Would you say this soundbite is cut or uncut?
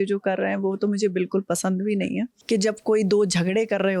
cut